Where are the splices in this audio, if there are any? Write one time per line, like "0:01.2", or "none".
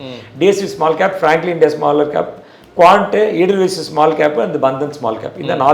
none